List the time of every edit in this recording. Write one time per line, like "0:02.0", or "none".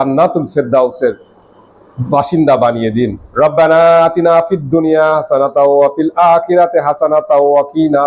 0:03.2